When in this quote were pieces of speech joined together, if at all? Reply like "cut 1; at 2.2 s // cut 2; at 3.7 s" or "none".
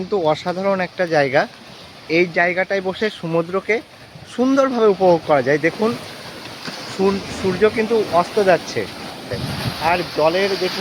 cut 1; at 9.4 s